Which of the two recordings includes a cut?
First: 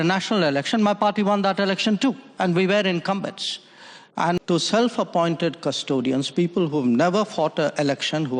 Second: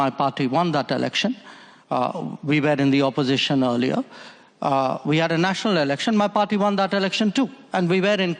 first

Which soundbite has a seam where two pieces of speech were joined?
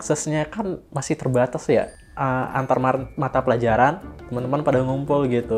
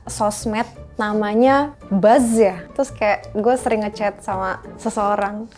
second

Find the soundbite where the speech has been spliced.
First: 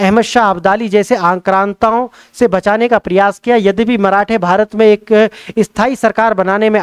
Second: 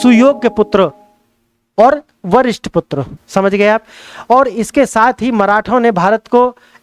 second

